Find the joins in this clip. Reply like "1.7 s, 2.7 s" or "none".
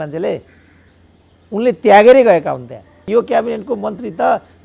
3.0 s